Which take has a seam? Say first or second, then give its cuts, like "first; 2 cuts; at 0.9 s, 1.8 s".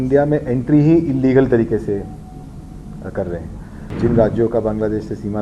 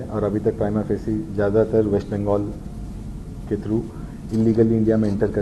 first; 1 cut; at 3.9 s